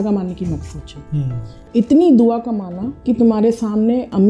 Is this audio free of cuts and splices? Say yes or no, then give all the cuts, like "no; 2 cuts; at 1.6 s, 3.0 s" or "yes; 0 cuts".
yes; 0 cuts